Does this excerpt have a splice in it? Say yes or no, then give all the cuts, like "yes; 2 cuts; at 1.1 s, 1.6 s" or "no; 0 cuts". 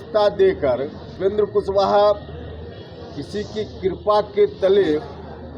yes; 1 cut; at 1.1 s